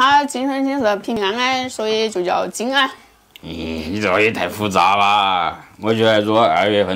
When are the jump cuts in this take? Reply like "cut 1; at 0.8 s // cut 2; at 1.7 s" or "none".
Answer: cut 1; at 1.2 s